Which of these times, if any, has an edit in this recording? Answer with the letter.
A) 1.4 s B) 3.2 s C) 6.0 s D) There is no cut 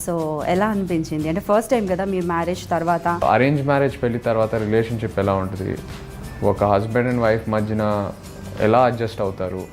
B